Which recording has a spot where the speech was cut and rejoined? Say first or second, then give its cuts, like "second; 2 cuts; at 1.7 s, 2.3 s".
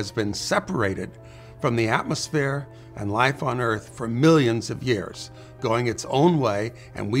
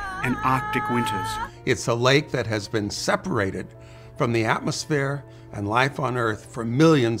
second; 1 cut; at 1.4 s